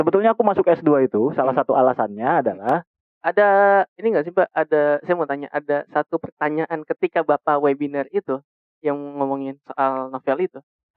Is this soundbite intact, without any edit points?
no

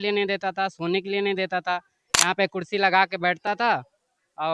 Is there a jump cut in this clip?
no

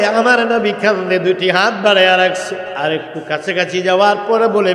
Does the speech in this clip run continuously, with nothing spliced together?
no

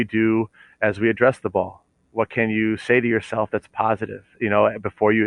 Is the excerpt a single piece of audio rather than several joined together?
yes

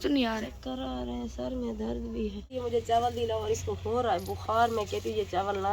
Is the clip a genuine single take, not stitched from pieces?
no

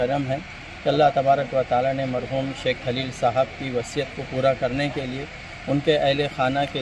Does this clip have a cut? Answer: no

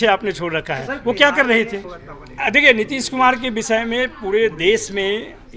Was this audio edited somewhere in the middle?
yes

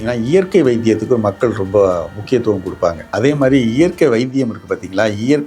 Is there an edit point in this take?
yes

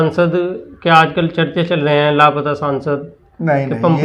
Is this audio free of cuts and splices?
yes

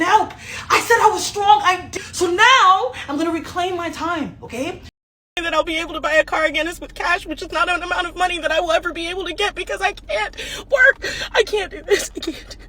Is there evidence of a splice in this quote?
yes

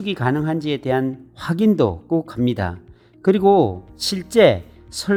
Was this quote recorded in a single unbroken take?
yes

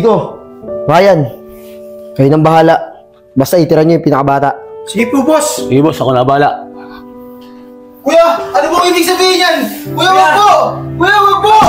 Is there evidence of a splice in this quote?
no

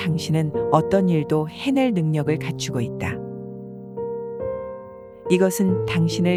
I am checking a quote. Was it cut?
no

